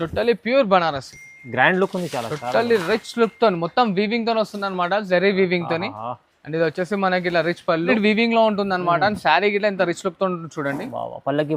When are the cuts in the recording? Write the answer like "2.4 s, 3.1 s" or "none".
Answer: 7.9 s